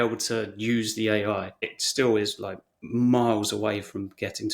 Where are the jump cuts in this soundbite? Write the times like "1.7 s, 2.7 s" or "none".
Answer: 1.7 s